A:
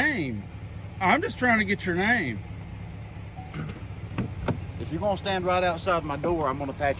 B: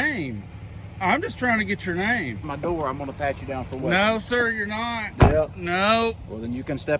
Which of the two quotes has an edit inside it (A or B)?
B